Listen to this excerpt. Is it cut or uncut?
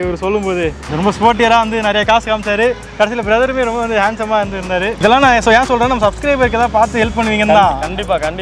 cut